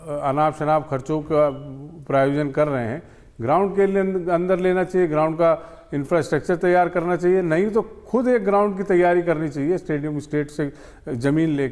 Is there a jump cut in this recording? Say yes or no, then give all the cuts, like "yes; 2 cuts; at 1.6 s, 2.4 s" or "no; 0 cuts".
no; 0 cuts